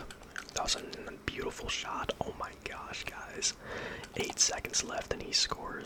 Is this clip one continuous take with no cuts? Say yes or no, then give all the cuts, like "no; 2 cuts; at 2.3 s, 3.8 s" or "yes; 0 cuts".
yes; 0 cuts